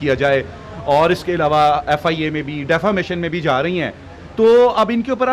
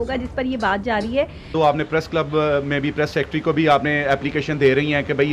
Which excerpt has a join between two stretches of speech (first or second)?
second